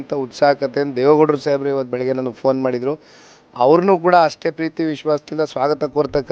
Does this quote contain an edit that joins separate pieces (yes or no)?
no